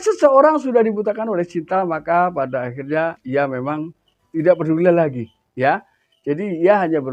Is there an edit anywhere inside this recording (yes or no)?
no